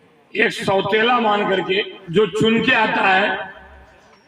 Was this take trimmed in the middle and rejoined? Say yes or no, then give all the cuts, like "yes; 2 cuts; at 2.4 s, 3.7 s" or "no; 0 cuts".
yes; 1 cut; at 2.0 s